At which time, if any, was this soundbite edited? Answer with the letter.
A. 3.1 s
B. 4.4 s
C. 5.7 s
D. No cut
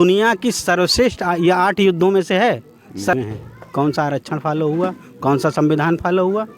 A